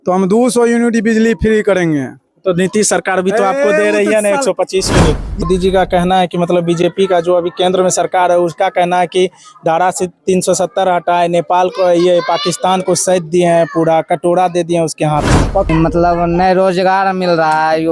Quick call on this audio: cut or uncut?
cut